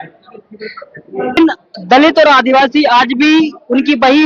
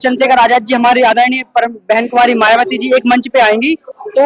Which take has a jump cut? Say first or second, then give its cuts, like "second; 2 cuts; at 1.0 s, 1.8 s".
first; 1 cut; at 1.4 s